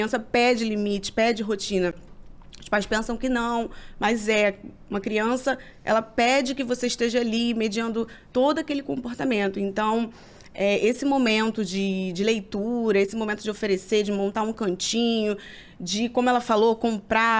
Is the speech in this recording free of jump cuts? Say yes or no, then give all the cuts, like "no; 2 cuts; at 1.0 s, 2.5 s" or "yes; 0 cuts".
yes; 0 cuts